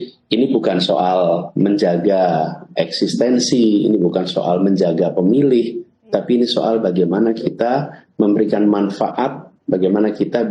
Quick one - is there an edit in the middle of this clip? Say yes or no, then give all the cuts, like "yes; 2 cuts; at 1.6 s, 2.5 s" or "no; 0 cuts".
no; 0 cuts